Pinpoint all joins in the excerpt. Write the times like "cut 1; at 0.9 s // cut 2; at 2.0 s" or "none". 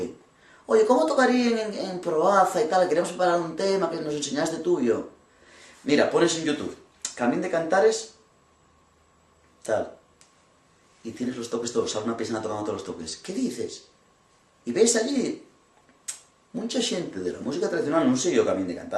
none